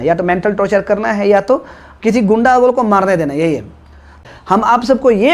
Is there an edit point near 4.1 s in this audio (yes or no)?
yes